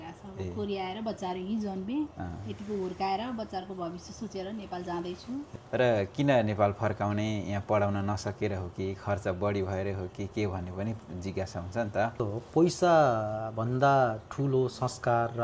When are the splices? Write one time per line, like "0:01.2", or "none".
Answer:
0:05.5
0:12.2